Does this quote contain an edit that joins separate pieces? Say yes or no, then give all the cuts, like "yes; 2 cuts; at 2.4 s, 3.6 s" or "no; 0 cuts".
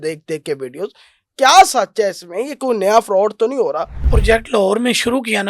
yes; 1 cut; at 4.1 s